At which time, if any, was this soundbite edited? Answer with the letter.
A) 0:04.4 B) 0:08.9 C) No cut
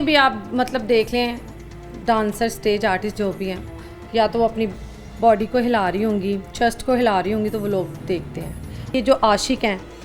B